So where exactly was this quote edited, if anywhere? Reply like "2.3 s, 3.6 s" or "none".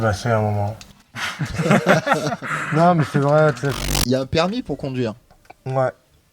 1.0 s, 3.7 s